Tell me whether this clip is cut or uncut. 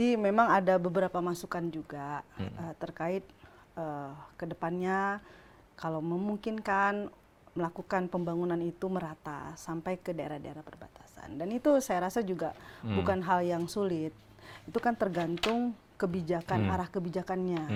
uncut